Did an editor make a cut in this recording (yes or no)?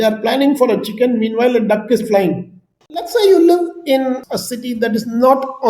yes